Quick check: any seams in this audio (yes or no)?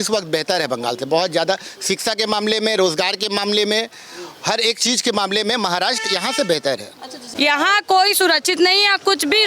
yes